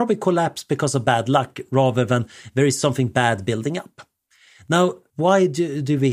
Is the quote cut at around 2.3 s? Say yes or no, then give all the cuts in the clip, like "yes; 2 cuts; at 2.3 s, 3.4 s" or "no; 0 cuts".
no; 1 cut; at 5.1 s